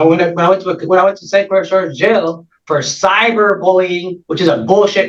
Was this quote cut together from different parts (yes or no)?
no